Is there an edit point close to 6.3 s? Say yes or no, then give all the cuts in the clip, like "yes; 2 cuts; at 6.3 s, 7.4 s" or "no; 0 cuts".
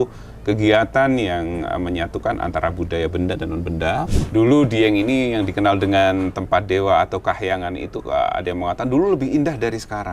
no; 1 cut; at 4.1 s